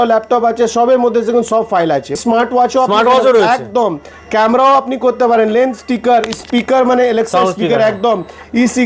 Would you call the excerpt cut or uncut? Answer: cut